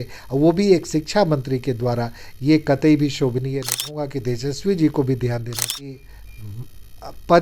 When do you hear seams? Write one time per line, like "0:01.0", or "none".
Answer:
0:04.0
0:05.6

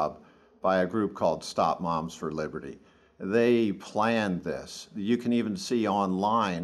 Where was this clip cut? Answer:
none

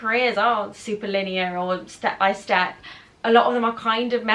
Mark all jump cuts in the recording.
none

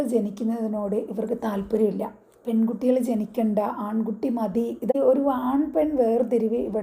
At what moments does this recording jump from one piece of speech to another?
0:04.9

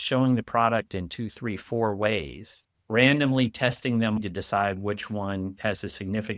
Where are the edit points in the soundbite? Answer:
0:04.2
0:05.5

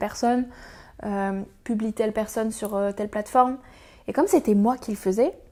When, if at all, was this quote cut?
none

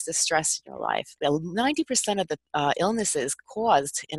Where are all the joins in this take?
0:01.2

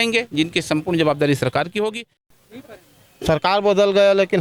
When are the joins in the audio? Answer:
0:02.2

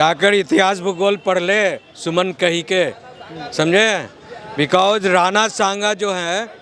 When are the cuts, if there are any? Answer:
none

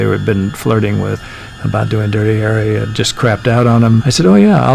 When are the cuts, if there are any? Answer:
0:01.2
0:02.9
0:04.0

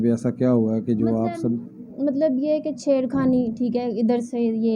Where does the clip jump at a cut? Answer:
none

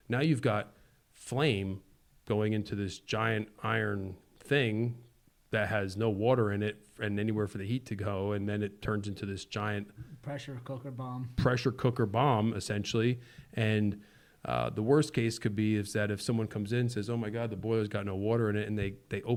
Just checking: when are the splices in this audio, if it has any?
none

